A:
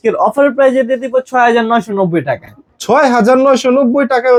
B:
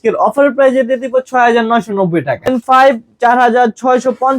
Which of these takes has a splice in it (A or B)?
B